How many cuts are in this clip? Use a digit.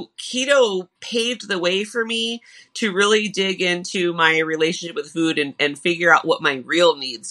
0